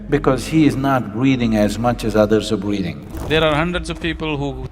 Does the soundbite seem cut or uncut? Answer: cut